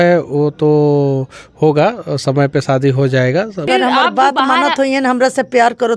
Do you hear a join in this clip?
yes; 1 cut; at 3.7 s

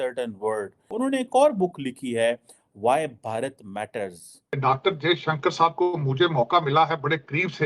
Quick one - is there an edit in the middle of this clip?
yes; 2 cuts; at 0.9 s, 4.5 s

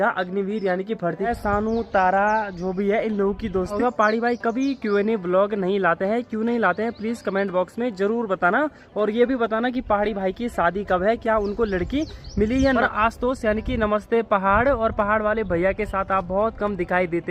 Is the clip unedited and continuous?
no; 3 cuts; at 1.3 s, 3.8 s, 12.8 s

